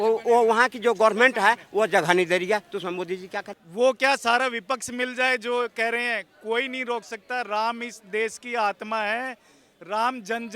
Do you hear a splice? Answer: yes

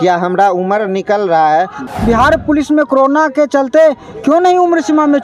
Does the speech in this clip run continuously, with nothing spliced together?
no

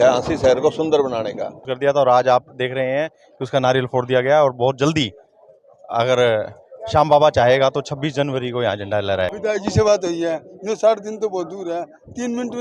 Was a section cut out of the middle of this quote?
yes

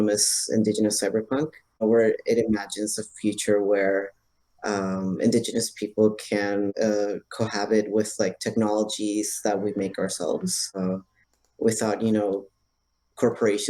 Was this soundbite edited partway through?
yes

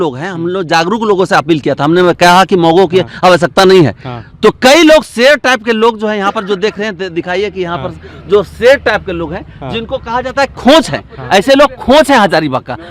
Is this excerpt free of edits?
yes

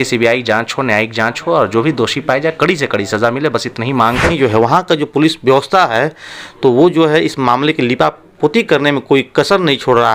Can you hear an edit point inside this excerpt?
yes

